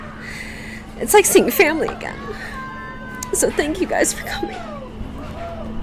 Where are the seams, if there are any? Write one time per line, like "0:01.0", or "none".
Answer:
none